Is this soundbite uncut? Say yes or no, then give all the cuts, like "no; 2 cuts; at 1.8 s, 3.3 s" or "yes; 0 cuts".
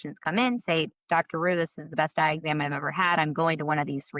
yes; 0 cuts